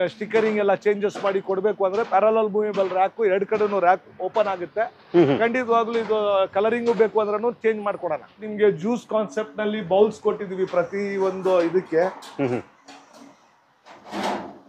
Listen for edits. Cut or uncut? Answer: cut